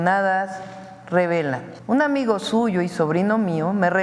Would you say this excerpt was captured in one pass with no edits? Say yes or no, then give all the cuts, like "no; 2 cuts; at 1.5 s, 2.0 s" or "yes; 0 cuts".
no; 1 cut; at 1.7 s